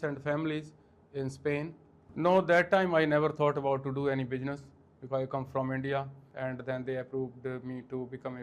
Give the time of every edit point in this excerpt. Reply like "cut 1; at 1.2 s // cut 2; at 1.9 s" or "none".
cut 1; at 2.1 s // cut 2; at 6.2 s